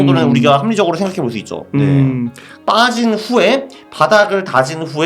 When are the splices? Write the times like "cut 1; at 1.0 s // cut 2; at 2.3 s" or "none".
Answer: cut 1; at 2.5 s